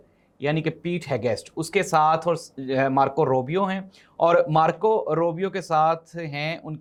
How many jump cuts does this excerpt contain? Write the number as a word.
zero